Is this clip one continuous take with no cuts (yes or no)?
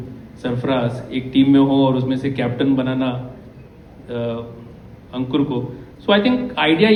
yes